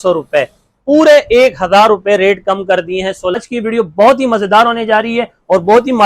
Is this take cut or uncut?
cut